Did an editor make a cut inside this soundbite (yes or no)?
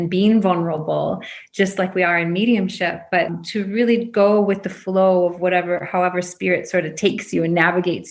yes